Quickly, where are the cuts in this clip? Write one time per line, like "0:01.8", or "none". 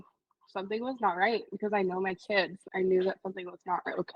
0:02.6